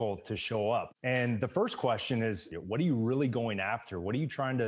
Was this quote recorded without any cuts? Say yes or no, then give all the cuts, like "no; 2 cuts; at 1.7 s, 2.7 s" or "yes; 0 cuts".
no; 2 cuts; at 0.9 s, 2.5 s